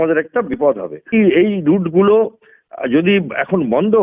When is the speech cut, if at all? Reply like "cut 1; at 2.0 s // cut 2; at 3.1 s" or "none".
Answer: cut 1; at 1.1 s